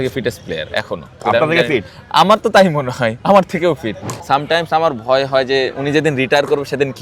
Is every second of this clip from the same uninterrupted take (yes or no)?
no